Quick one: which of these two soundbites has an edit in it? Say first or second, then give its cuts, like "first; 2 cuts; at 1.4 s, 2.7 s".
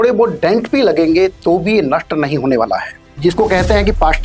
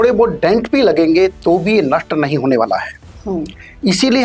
first; 1 cut; at 3.1 s